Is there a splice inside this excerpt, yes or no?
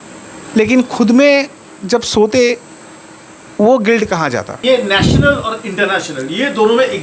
yes